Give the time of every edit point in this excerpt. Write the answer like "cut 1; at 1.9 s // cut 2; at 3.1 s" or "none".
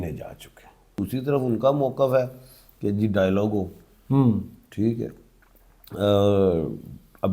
cut 1; at 1.0 s